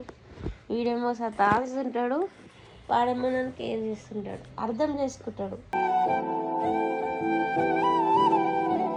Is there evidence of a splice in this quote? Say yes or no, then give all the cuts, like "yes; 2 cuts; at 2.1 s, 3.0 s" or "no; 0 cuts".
no; 0 cuts